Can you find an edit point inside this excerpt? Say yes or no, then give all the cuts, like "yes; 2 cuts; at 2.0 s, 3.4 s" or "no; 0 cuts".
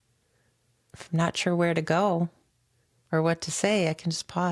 no; 0 cuts